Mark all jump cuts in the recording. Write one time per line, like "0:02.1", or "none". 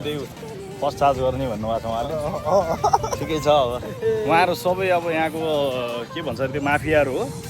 0:03.9